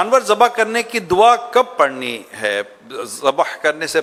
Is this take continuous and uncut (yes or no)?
yes